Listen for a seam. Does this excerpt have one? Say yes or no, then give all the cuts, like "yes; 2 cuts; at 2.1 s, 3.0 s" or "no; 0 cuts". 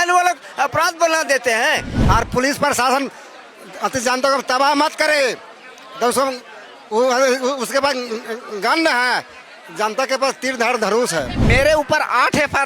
yes; 2 cuts; at 1.9 s, 11.4 s